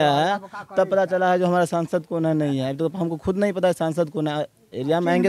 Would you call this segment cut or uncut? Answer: uncut